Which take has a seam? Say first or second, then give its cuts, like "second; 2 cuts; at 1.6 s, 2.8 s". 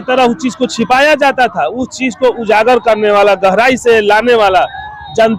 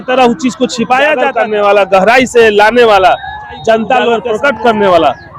second; 2 cuts; at 1.4 s, 4.2 s